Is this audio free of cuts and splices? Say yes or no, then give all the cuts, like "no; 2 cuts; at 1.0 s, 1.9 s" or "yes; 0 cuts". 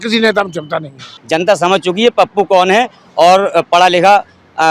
no; 1 cut; at 1.1 s